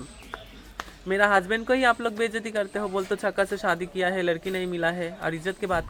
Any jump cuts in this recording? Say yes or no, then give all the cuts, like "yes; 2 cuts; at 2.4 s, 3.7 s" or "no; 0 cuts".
no; 0 cuts